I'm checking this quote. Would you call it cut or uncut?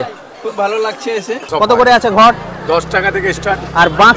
cut